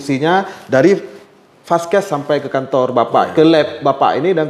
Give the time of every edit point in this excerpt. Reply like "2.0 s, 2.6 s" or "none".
none